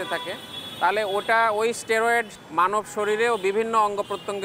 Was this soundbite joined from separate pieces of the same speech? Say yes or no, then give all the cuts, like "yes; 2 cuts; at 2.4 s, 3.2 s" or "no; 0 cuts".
yes; 1 cut; at 2.4 s